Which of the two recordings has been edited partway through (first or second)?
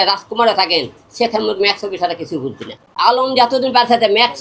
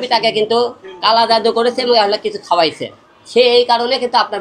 first